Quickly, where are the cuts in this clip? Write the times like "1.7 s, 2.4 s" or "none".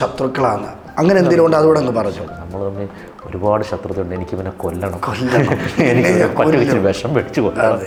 none